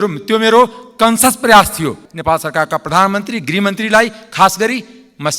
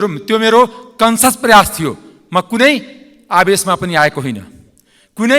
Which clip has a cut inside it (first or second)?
first